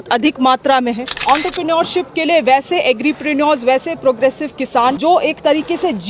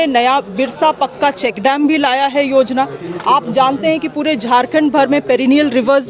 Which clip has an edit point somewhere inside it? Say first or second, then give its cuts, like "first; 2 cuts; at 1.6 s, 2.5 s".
first; 2 cuts; at 1.1 s, 5.0 s